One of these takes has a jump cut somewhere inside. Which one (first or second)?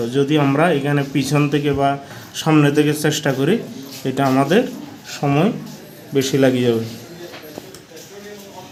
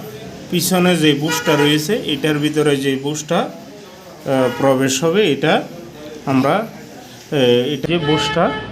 second